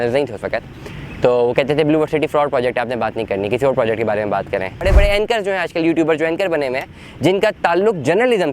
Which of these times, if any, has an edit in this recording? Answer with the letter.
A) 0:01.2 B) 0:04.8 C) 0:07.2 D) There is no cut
B